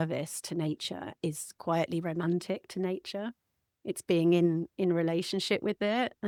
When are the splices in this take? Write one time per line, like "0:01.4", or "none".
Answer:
none